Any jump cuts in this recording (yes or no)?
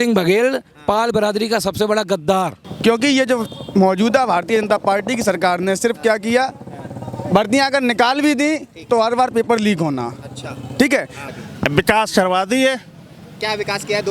yes